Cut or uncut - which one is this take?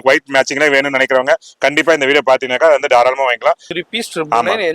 cut